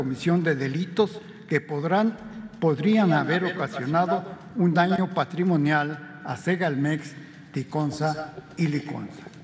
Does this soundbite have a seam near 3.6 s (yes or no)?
no